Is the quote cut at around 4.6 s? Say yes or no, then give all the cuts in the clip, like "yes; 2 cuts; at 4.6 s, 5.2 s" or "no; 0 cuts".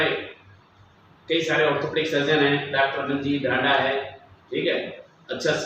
no; 0 cuts